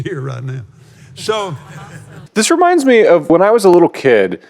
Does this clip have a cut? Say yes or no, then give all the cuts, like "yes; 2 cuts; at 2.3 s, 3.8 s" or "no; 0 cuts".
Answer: yes; 2 cuts; at 2.2 s, 3.3 s